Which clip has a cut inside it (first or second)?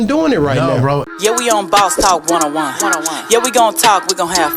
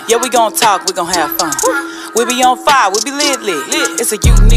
first